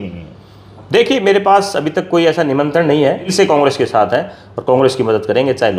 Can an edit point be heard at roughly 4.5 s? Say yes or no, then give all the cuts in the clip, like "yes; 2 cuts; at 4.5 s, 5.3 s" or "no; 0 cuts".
no; 1 cut; at 3.3 s